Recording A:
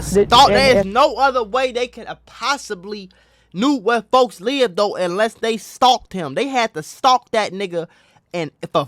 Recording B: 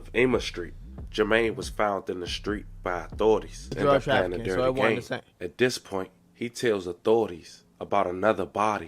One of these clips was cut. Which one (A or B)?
B